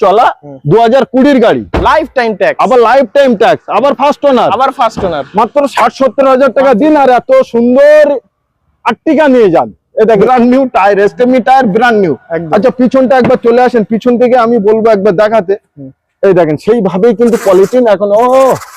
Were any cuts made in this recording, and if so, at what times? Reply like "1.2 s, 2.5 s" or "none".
10.2 s